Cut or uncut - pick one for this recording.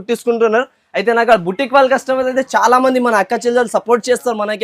uncut